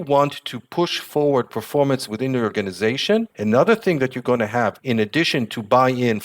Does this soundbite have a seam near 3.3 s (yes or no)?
yes